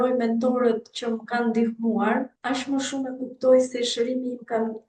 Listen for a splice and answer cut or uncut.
cut